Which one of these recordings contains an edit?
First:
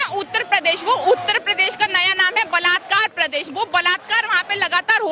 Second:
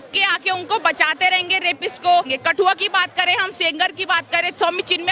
second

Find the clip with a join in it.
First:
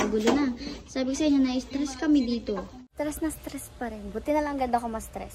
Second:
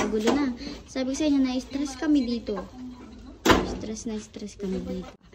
first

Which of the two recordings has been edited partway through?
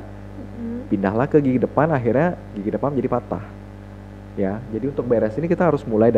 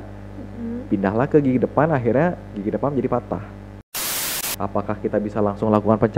second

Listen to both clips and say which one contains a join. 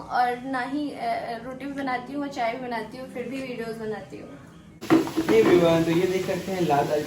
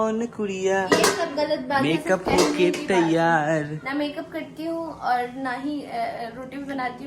first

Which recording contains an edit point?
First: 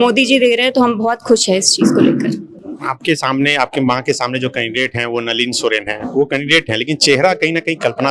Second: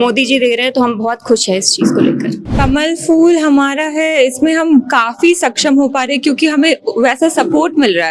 second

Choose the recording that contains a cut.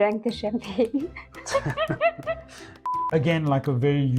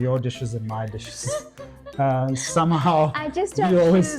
first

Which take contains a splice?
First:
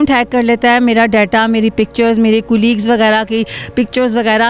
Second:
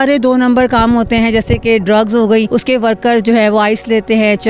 second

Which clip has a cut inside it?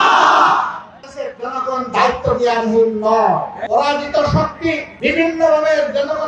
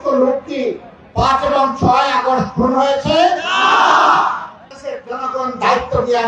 first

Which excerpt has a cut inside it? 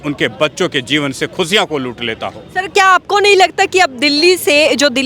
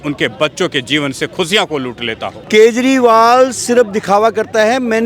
second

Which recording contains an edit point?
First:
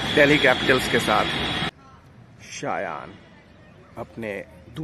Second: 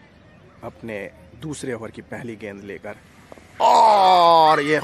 first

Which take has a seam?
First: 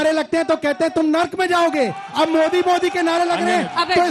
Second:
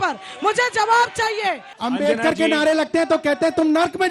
second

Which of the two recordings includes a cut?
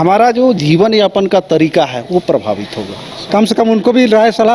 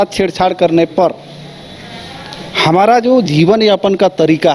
first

